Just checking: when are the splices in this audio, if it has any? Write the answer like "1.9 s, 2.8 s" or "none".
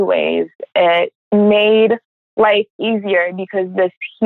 1.2 s, 2.2 s